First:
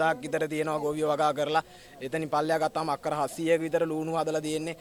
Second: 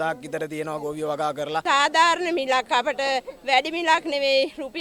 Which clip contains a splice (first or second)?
second